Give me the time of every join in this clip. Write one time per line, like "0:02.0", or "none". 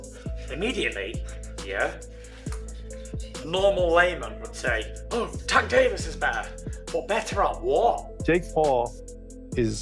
0:08.4

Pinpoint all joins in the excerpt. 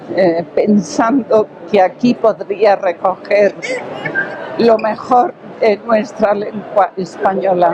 none

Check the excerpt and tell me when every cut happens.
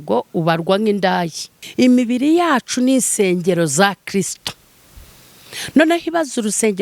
0:01.6

